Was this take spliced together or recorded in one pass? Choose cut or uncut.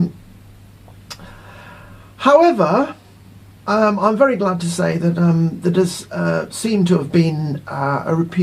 cut